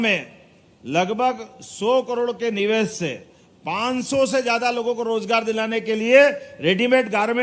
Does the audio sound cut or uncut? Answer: uncut